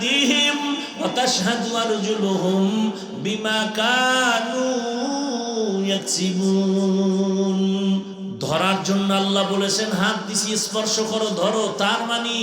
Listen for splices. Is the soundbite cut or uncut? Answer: cut